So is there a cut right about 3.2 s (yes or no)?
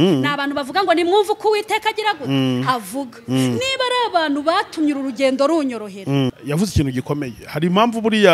no